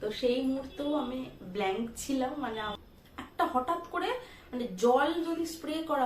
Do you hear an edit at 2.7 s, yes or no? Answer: yes